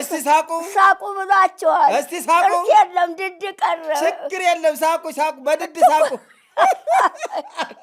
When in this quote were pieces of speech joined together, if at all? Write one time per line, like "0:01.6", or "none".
none